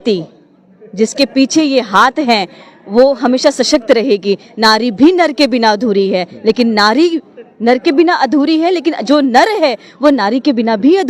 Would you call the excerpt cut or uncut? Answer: uncut